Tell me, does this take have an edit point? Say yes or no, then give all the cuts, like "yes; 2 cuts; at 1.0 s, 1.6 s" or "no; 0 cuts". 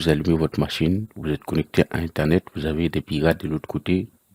no; 0 cuts